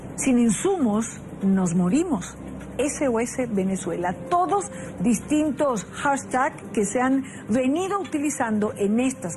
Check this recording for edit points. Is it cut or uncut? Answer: uncut